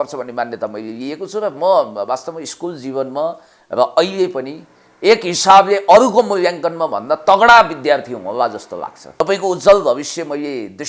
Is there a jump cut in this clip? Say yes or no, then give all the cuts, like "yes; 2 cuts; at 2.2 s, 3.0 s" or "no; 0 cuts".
yes; 1 cut; at 9.2 s